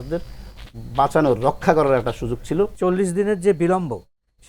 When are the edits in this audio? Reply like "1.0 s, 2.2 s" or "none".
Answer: 2.7 s